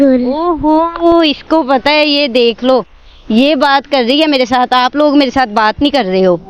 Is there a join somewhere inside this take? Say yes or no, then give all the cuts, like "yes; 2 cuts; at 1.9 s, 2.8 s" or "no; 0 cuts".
no; 0 cuts